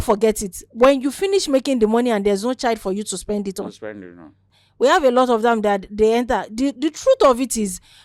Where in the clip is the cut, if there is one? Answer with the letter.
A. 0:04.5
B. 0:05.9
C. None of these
A